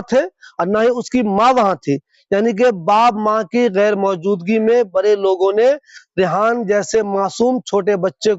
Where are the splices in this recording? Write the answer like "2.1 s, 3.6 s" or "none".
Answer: none